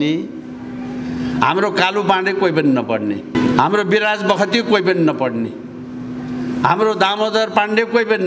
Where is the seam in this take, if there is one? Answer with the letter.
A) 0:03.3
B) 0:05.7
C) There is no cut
A